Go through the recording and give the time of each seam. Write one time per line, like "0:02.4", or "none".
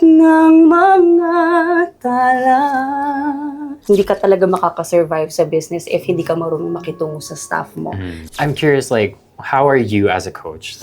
0:03.8
0:08.2

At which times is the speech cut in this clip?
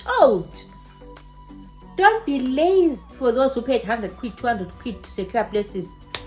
0:03.1

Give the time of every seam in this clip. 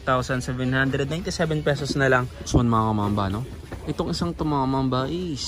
0:02.5

